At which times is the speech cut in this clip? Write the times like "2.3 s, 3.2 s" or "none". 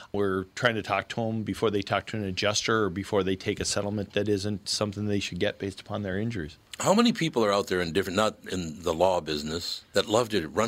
none